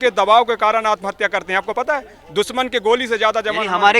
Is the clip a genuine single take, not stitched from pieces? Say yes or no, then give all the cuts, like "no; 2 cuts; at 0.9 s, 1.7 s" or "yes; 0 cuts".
yes; 0 cuts